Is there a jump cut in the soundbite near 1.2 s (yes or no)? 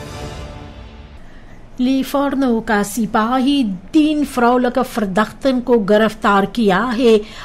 yes